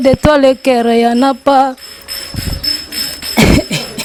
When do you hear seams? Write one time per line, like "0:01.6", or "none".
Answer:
none